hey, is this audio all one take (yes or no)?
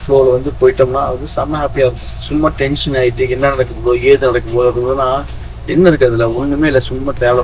yes